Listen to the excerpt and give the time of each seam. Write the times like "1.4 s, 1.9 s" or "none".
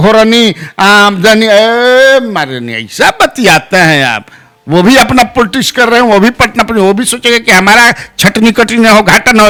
none